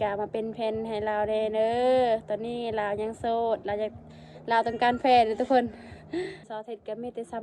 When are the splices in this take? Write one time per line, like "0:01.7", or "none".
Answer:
0:06.5